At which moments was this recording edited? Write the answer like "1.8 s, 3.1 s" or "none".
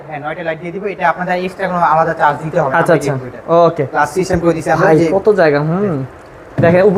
none